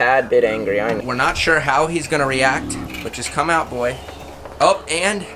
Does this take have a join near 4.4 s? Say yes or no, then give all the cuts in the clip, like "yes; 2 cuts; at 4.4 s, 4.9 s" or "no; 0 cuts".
no; 2 cuts; at 1.0 s, 2.9 s